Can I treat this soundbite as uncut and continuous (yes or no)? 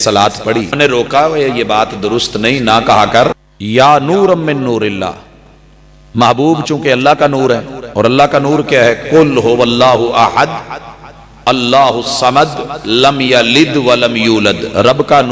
no